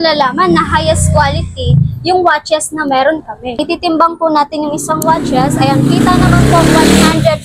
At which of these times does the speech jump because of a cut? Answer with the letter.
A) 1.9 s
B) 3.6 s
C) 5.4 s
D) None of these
B